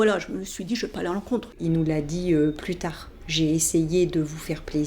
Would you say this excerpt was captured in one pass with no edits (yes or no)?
no